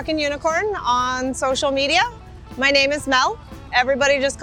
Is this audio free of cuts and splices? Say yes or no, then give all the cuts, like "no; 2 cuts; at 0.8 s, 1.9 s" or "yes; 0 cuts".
yes; 0 cuts